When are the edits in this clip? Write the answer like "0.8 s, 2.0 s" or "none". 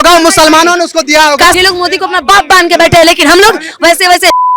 1.6 s